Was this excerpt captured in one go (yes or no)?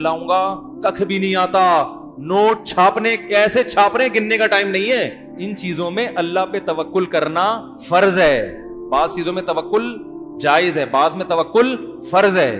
no